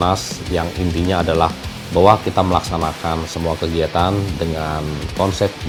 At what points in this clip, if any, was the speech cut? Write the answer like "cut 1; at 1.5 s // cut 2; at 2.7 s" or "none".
none